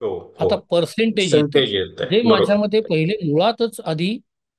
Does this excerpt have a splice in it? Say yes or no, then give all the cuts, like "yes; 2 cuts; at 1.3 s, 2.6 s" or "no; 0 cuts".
no; 0 cuts